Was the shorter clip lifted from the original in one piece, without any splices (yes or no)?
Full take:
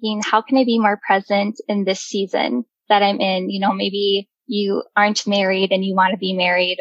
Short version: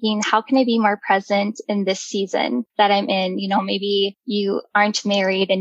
no